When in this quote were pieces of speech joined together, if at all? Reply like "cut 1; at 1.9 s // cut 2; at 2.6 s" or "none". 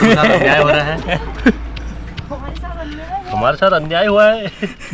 none